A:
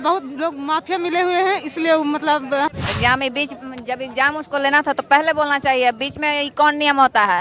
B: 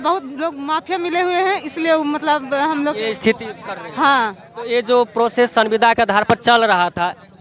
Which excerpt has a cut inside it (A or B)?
A